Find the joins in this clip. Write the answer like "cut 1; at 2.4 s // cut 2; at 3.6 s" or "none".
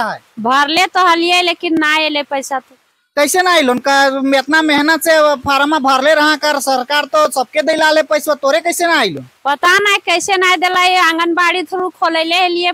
none